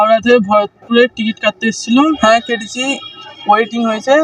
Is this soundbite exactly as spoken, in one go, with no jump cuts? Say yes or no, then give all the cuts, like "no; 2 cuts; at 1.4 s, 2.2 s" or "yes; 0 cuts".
no; 1 cut; at 2.2 s